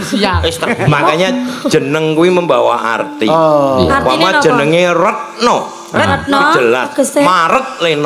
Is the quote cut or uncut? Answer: uncut